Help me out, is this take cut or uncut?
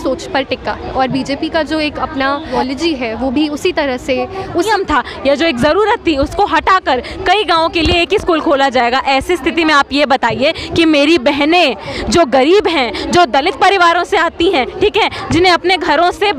cut